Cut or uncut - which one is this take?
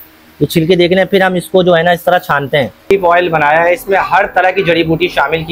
cut